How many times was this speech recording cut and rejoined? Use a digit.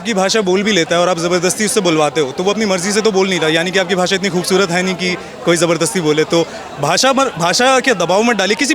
0